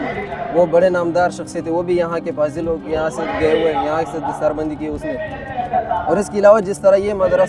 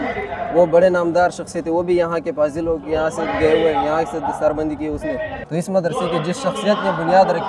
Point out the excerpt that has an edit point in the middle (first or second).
second